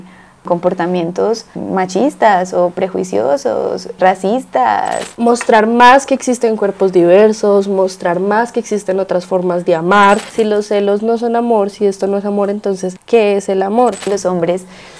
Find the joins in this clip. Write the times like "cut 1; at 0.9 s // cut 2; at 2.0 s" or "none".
cut 1; at 5.1 s // cut 2; at 10.3 s // cut 3; at 14.0 s

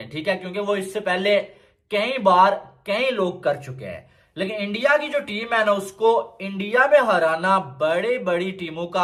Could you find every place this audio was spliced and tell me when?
none

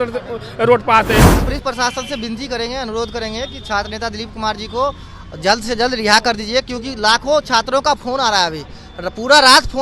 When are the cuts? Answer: cut 1; at 1.4 s

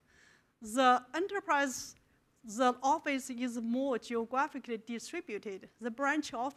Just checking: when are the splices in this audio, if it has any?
none

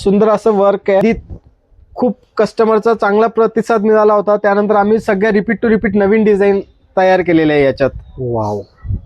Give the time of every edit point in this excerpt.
cut 1; at 1.0 s

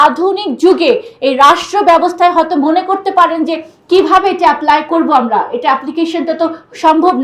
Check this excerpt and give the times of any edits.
none

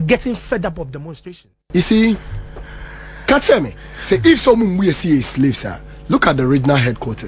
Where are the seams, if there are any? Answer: cut 1; at 1.2 s

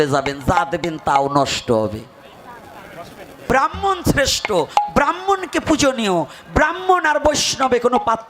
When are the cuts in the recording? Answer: cut 1; at 3.5 s

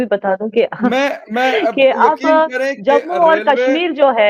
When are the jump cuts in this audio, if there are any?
none

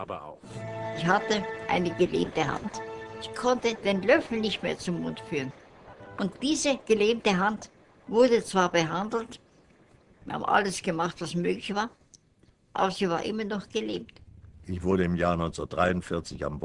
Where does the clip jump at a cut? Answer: cut 1; at 15.7 s

